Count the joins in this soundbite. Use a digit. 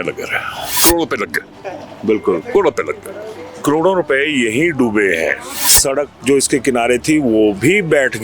2